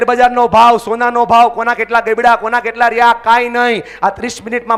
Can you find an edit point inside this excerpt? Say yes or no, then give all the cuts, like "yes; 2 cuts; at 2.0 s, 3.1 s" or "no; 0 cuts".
no; 0 cuts